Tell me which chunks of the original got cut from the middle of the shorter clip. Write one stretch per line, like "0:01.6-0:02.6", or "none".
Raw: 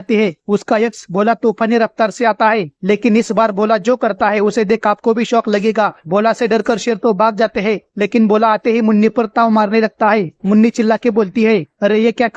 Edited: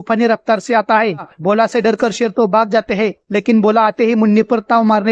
0:02.8-0:05.9